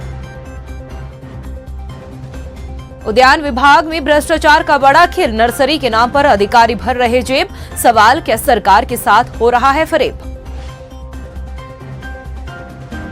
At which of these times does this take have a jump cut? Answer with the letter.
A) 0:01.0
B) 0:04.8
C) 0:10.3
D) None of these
A